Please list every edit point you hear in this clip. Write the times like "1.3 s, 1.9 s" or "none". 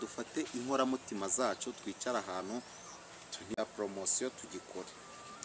3.5 s